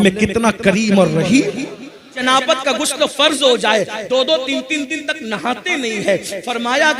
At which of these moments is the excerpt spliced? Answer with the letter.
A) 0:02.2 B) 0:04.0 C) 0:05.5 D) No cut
A